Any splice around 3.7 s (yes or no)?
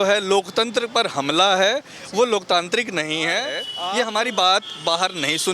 yes